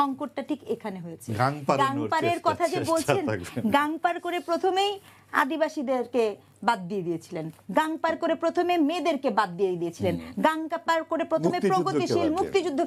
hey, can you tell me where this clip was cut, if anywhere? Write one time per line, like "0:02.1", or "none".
none